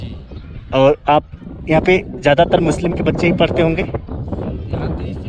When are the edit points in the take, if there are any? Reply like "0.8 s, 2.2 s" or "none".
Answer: none